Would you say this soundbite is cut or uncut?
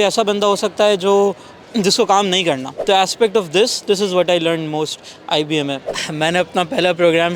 cut